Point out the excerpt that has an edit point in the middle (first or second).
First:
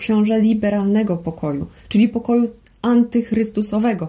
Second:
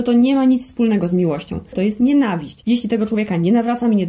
second